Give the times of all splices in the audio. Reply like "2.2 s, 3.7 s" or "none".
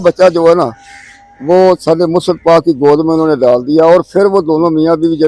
none

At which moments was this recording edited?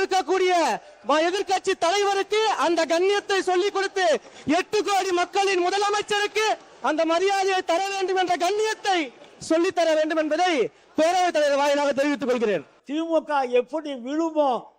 12.8 s

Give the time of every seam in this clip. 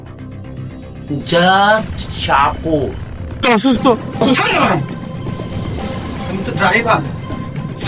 3.5 s

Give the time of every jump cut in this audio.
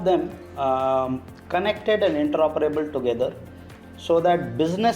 none

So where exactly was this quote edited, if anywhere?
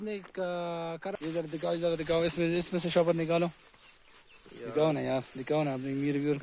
1.1 s

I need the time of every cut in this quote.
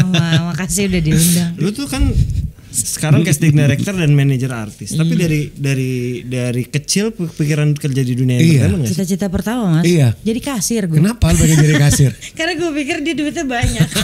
1.5 s, 8.9 s, 10.9 s

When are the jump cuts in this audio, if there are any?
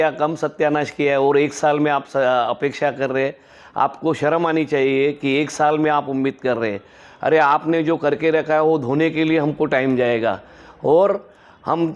none

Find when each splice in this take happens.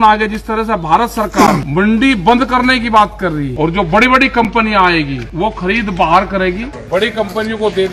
1.7 s, 3.5 s, 5.2 s, 6.7 s

